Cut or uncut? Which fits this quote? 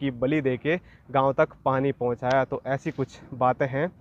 uncut